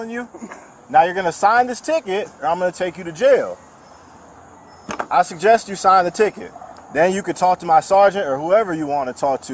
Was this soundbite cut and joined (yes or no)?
no